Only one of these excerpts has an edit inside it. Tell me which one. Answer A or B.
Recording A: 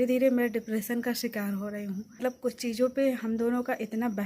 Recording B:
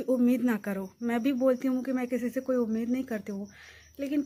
A